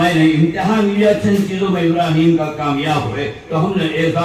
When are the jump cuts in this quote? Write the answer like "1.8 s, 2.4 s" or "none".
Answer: none